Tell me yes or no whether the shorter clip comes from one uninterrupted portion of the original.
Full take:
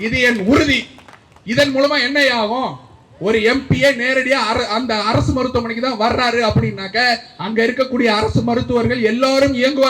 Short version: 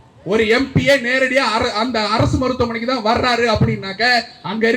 yes